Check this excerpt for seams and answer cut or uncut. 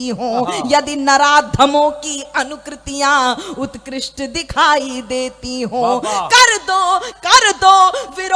cut